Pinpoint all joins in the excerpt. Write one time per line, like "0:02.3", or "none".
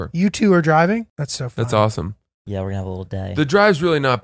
0:01.2